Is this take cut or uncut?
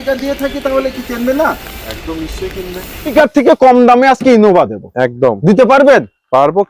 cut